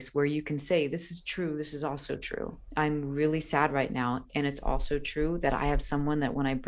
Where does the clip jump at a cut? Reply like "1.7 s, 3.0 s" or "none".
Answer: 2.6 s